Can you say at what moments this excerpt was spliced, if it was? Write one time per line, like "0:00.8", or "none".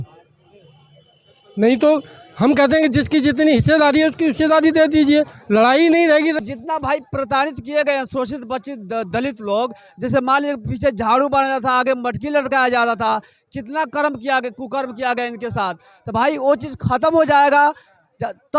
0:06.4